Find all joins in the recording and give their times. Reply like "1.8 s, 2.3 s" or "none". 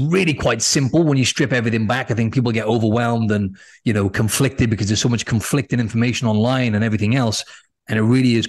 none